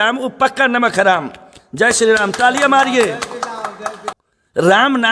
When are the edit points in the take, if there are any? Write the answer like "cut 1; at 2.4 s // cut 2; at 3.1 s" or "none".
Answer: cut 1; at 4.0 s